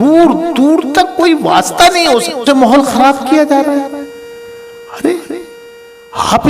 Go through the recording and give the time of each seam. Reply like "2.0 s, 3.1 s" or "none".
2.4 s